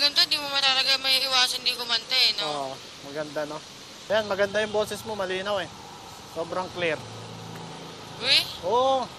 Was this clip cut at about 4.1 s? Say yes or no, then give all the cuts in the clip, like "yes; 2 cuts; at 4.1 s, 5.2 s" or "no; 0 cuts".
yes; 1 cut; at 4.1 s